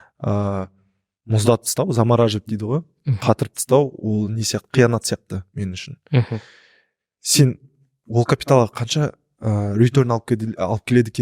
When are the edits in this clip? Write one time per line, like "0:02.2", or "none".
none